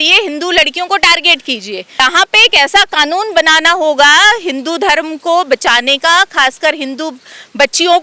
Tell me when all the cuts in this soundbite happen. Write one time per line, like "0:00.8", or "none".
0:02.0